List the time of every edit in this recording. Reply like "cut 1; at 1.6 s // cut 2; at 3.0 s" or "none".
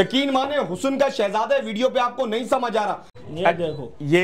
cut 1; at 3.1 s